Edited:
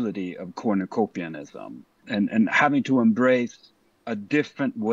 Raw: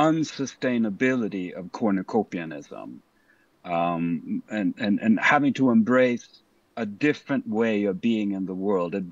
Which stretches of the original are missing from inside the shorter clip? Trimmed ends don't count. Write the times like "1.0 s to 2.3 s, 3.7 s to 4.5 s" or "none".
3.2 s to 4.8 s